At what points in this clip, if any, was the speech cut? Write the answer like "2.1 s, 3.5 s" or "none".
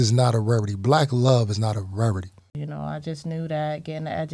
2.5 s